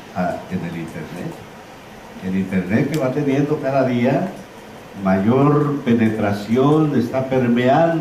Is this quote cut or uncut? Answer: cut